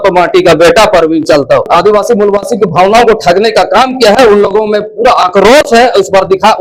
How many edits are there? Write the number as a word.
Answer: one